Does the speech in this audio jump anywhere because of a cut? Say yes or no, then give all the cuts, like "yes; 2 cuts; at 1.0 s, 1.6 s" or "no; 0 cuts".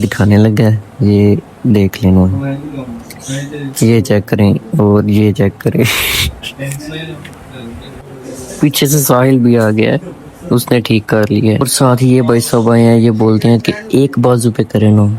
yes; 1 cut; at 11.7 s